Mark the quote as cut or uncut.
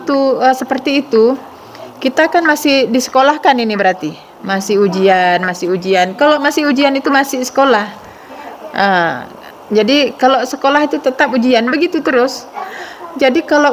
uncut